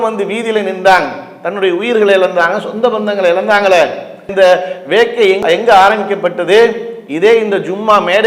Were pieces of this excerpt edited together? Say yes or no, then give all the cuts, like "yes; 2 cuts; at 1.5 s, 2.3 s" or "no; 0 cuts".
no; 0 cuts